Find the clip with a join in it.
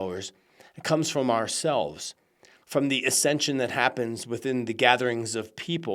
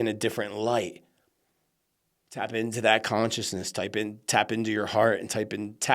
second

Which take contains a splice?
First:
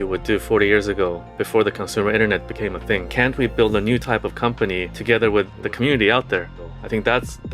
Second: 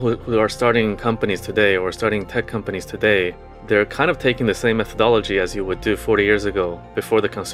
first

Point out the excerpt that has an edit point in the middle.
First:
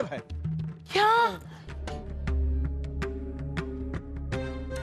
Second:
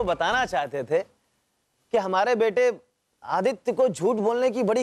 first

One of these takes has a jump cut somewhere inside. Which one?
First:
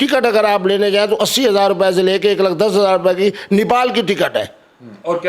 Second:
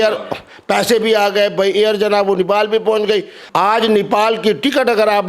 second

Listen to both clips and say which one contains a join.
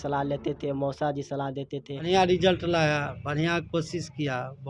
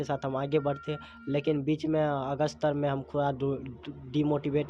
first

